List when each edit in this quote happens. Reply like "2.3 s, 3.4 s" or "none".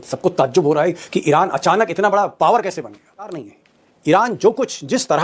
3.4 s